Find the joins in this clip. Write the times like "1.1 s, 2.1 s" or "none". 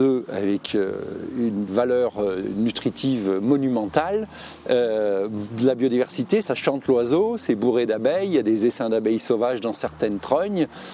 none